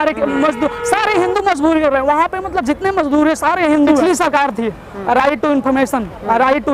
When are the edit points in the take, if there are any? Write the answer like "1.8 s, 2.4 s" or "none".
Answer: 4.0 s